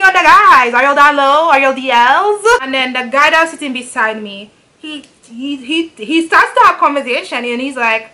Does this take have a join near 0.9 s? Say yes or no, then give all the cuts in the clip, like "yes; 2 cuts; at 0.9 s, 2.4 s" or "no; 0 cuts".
no; 1 cut; at 2.5 s